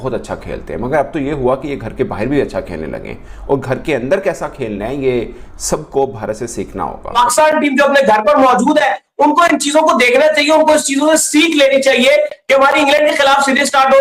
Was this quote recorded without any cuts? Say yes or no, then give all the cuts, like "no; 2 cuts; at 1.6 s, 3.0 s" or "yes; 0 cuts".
no; 1 cut; at 7.1 s